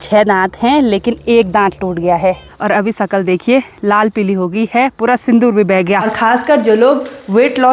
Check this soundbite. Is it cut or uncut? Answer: cut